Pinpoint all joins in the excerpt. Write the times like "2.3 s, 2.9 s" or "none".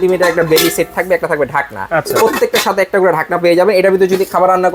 none